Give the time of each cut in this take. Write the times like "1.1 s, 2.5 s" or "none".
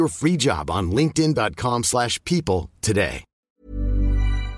3.5 s

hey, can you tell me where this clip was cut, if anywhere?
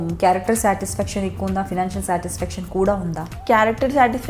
3.3 s

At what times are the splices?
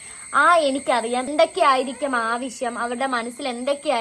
1.3 s

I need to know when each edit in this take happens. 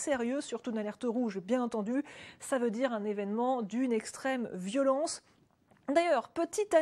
0.9 s

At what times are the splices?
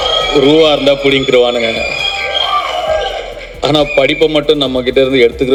none

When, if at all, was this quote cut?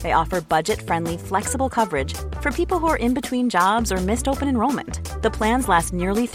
none

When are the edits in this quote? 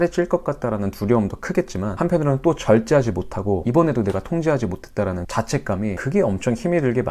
1.9 s, 3.6 s, 5.4 s

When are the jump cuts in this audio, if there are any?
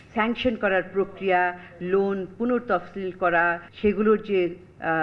3.6 s

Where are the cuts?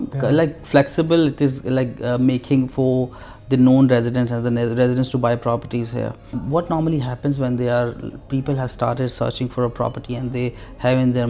none

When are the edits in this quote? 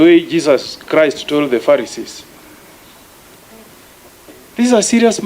none

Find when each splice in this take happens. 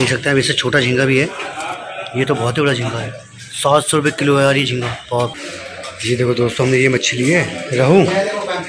5.3 s

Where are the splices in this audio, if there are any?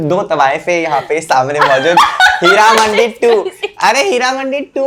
none

